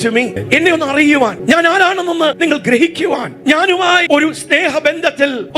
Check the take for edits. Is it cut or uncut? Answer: cut